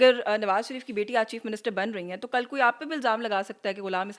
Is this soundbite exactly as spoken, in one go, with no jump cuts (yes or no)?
yes